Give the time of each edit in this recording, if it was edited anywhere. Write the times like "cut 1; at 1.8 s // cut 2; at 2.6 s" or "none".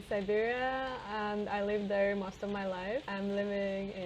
cut 1; at 3.1 s